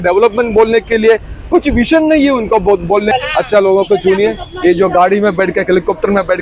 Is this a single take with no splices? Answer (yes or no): no